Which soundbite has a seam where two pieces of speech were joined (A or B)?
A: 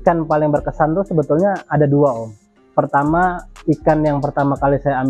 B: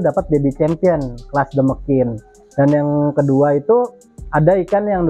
B